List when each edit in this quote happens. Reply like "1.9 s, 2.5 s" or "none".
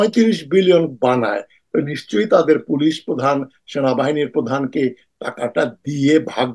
none